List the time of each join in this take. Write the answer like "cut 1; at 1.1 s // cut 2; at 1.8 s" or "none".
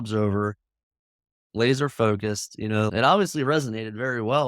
cut 1; at 2.9 s